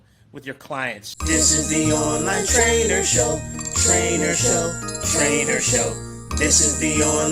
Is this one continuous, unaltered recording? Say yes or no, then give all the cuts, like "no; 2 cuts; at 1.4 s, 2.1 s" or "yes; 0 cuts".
no; 1 cut; at 1.1 s